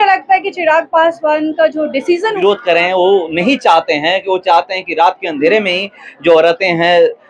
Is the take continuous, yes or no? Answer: no